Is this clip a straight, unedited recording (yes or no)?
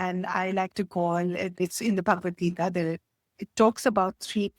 no